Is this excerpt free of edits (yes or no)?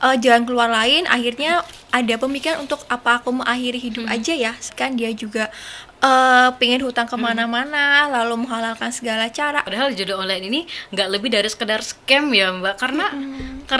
no